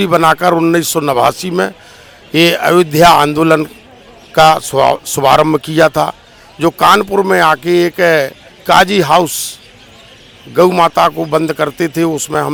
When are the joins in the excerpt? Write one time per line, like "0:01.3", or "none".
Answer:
none